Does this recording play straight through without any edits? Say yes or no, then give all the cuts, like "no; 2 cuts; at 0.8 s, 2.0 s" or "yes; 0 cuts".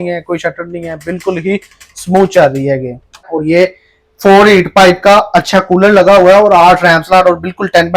no; 1 cut; at 3.3 s